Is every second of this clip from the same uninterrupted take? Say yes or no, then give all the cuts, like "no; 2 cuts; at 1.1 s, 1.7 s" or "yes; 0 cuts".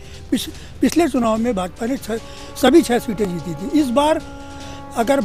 yes; 0 cuts